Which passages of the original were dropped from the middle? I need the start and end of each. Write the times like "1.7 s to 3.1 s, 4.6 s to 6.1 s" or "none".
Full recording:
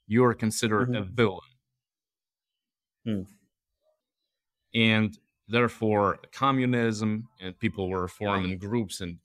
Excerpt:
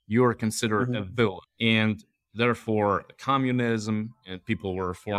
1.5 s to 4.6 s